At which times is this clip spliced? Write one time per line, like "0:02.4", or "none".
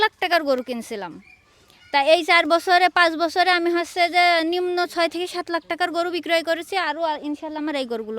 none

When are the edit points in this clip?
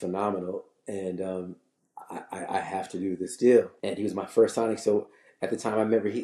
0:03.8

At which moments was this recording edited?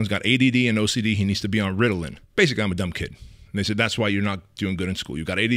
0:02.2

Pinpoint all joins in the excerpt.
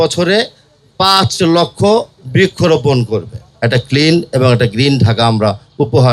0:03.4

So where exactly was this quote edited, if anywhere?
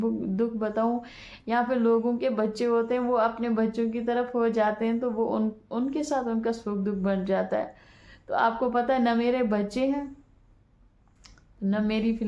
none

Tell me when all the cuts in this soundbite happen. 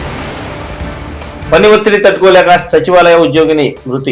none

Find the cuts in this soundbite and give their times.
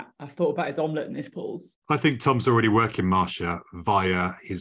0:01.7

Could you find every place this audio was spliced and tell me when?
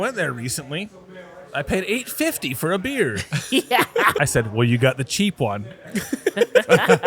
0:04.1

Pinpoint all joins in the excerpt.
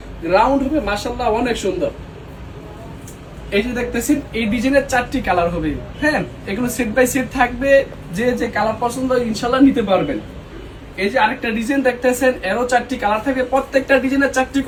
none

